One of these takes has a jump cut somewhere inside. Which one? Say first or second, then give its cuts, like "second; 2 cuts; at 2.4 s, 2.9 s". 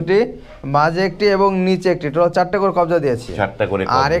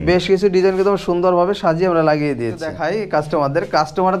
second; 1 cut; at 2.8 s